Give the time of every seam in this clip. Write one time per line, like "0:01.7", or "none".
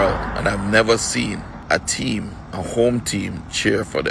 0:01.5